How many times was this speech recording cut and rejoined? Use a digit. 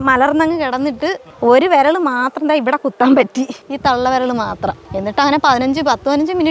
3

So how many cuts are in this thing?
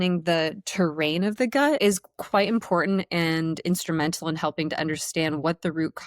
1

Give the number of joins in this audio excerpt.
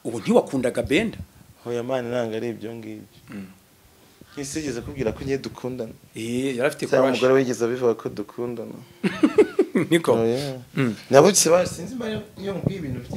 0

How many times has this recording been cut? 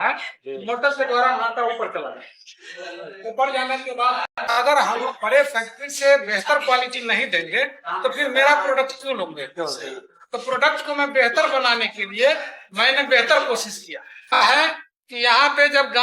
2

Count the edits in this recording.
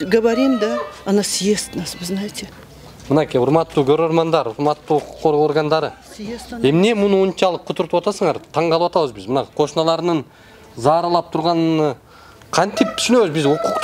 0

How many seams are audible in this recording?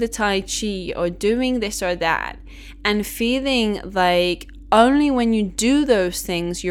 0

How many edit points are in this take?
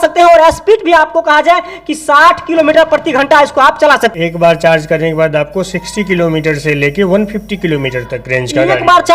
1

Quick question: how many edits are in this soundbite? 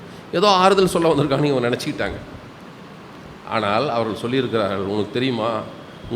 0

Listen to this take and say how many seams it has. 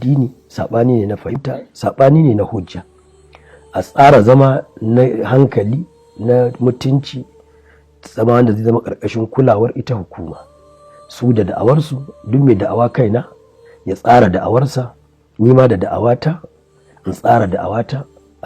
1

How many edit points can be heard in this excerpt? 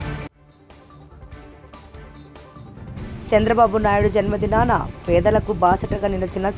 1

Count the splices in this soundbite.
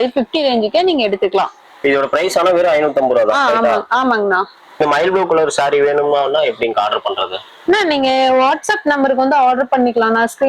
1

